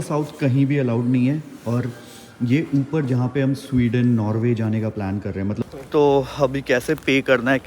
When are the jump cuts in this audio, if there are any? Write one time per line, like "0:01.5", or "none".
0:05.6